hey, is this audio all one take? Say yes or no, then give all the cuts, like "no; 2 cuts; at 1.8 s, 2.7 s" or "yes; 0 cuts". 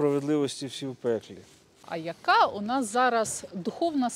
no; 1 cut; at 1.8 s